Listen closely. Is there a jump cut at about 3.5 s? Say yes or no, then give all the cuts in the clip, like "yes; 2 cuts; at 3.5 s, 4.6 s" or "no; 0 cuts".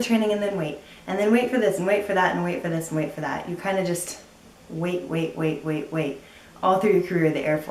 no; 0 cuts